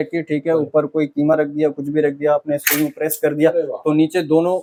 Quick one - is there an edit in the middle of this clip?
no; 0 cuts

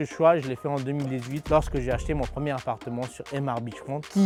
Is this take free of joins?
yes; 0 cuts

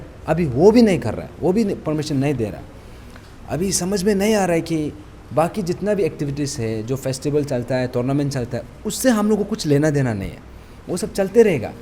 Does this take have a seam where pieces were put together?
no; 0 cuts

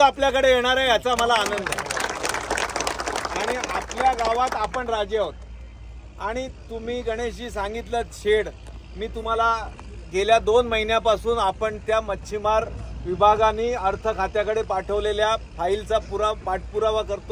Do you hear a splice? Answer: no; 0 cuts

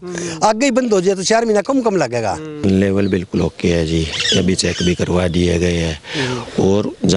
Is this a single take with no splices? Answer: no; 1 cut; at 2.6 s

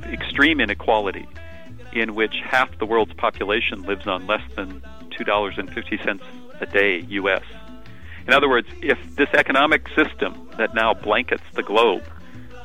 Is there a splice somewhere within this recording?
no; 0 cuts

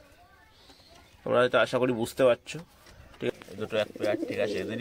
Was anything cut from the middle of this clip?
yes; 1 cut; at 3.3 s

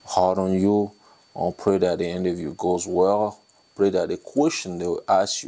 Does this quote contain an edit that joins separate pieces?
no; 0 cuts

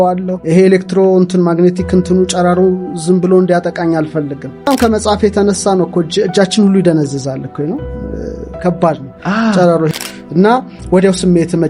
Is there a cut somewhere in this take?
yes; 2 cuts; at 4.7 s, 9.9 s

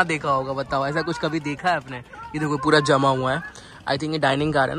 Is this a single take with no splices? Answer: yes; 0 cuts

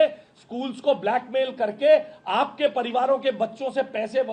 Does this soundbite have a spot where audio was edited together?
no; 0 cuts

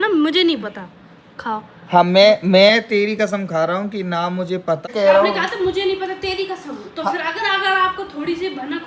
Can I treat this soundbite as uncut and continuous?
no; 1 cut; at 4.9 s

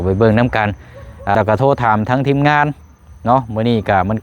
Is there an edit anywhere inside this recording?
yes; 1 cut; at 1.3 s

